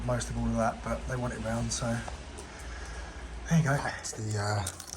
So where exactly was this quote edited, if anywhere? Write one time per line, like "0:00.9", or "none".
0:03.9